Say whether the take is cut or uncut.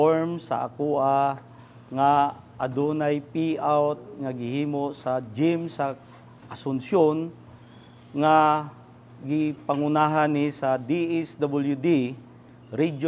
uncut